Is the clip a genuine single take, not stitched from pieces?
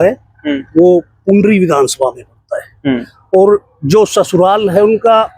yes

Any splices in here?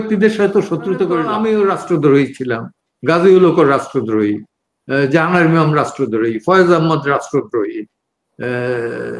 yes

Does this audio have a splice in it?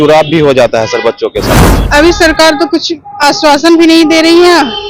yes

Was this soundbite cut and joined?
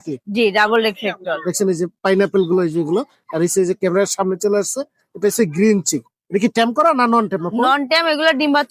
no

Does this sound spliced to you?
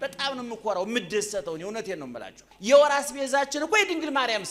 yes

